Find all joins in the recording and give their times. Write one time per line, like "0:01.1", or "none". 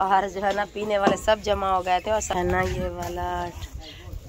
0:02.3

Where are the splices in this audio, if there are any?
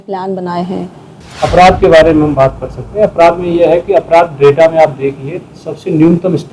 0:01.2

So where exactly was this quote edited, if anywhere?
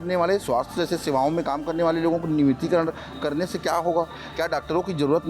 none

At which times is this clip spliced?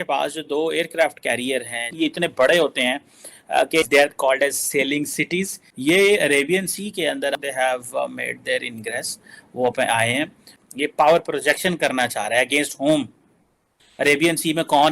0:01.8
0:05.7

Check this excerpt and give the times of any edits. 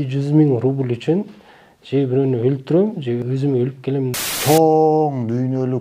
0:03.2
0:04.1

